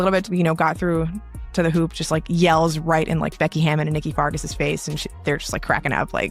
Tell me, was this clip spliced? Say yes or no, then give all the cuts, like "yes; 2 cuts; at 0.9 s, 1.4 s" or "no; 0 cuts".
yes; 1 cut; at 5.1 s